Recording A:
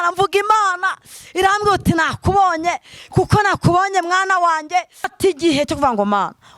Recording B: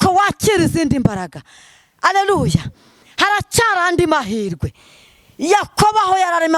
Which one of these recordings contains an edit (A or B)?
A